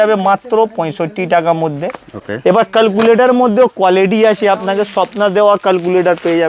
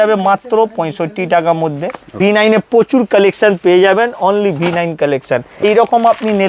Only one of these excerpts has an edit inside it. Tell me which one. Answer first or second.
second